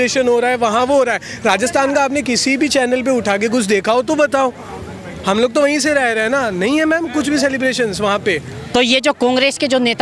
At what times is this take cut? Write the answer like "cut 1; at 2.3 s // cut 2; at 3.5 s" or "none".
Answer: cut 1; at 8.5 s

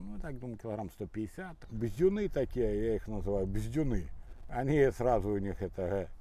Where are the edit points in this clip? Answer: cut 1; at 1.6 s

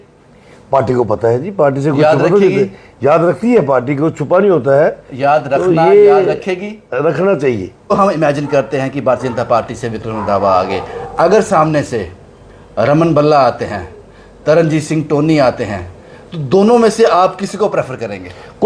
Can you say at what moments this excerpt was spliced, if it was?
cut 1; at 7.9 s

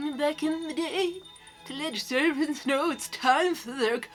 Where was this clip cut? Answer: none

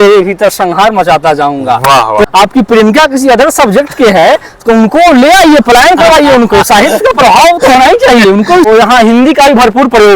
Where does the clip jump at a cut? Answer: cut 1; at 2.3 s // cut 2; at 8.7 s

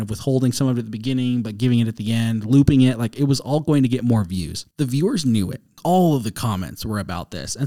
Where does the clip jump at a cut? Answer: cut 1; at 4.6 s // cut 2; at 5.8 s

